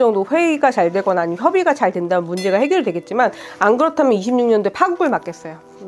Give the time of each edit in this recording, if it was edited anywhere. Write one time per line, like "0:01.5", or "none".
none